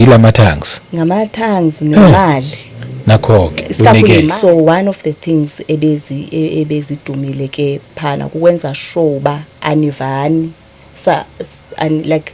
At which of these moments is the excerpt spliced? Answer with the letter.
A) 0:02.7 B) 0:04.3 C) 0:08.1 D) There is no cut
B